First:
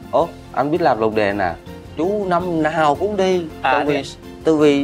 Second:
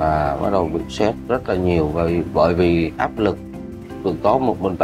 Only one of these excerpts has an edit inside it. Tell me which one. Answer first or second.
first